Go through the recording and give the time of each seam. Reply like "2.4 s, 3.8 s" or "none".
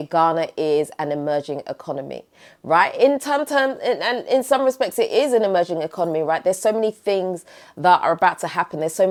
none